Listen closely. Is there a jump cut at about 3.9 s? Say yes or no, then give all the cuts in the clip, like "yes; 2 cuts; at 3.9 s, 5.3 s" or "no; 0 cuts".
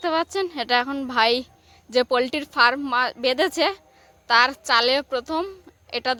no; 0 cuts